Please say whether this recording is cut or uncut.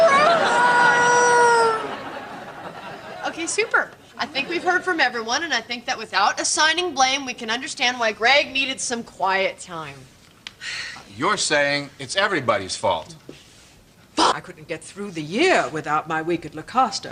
uncut